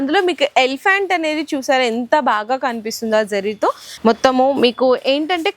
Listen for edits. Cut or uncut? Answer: cut